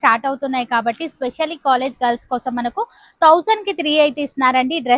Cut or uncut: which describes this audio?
uncut